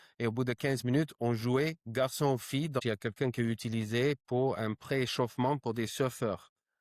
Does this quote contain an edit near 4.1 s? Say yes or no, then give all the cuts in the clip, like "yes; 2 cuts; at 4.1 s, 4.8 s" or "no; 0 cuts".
no; 1 cut; at 2.8 s